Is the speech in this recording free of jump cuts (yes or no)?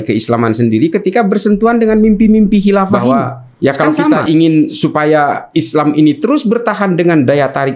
no